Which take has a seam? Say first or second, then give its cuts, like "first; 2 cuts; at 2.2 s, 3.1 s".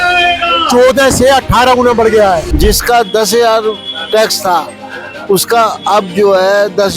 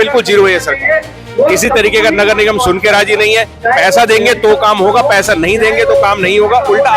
first; 1 cut; at 2.5 s